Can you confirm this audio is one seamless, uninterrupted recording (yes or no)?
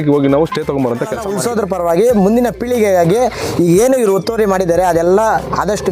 no